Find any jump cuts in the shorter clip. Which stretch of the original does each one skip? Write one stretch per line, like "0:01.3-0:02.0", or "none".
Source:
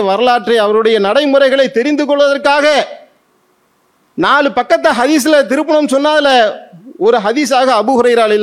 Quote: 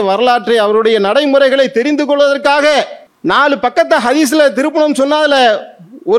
0:03.0-0:04.0